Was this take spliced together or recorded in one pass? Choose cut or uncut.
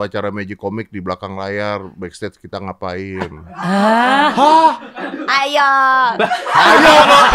uncut